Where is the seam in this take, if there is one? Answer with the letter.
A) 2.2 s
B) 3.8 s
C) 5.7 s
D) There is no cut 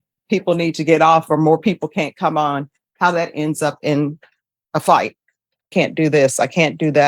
C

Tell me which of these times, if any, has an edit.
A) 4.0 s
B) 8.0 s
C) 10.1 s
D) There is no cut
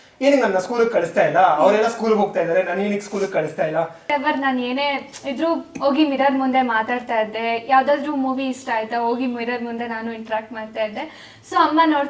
A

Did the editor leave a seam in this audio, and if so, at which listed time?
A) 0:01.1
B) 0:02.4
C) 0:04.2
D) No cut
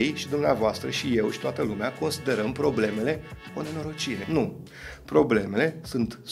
C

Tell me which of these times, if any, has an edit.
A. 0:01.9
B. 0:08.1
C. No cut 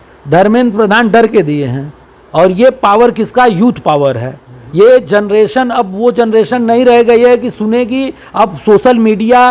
C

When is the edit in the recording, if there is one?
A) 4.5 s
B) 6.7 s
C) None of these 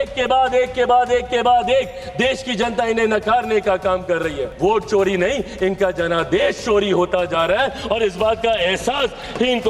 A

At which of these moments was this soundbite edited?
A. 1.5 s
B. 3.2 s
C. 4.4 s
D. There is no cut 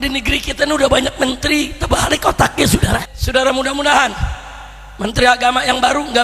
B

